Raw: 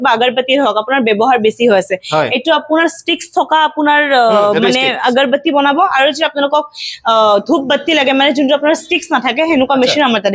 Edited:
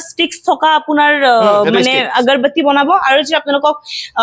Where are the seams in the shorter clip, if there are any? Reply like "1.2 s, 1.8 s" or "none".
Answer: none

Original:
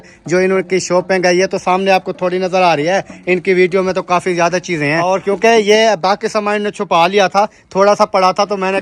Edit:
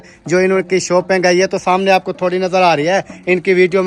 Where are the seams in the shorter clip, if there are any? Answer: none

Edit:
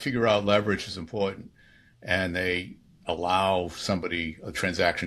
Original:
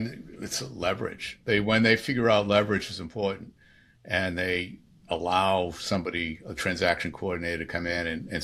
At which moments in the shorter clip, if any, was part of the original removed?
none

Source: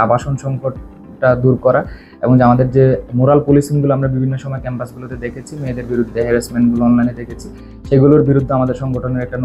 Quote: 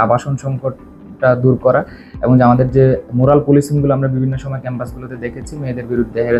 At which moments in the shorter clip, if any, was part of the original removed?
none

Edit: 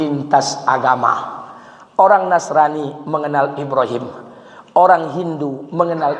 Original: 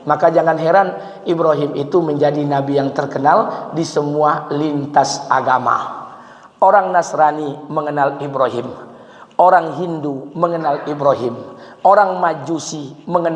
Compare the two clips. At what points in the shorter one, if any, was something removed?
none

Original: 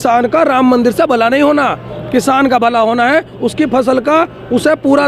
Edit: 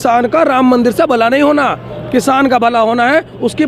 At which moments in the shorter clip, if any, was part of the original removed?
none

